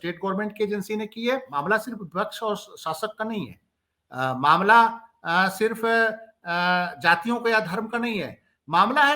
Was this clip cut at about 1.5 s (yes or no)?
yes